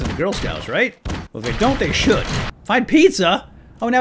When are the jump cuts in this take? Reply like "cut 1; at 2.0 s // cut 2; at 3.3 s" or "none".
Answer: cut 1; at 2.5 s